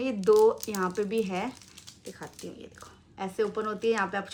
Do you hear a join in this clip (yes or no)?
no